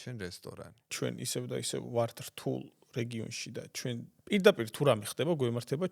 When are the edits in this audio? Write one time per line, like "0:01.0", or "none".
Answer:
0:00.9
0:04.1